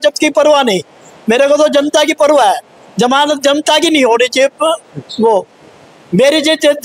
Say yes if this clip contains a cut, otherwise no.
no